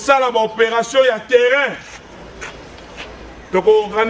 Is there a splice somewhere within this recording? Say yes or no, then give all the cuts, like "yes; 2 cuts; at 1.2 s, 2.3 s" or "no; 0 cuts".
no; 0 cuts